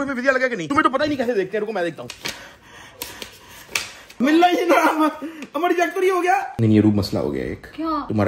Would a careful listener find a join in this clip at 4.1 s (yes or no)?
yes